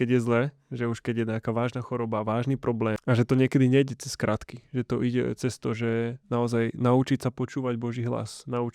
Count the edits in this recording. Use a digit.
1